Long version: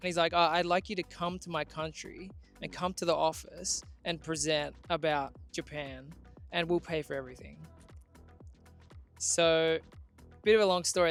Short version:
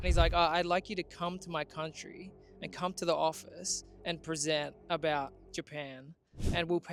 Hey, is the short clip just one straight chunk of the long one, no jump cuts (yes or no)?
yes